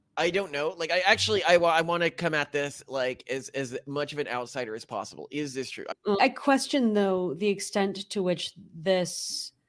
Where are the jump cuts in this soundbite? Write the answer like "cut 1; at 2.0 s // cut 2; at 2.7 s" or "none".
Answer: cut 1; at 6.2 s